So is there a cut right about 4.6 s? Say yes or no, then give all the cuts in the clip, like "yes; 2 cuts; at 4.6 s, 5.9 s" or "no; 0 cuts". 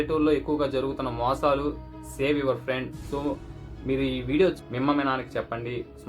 yes; 1 cut; at 4.6 s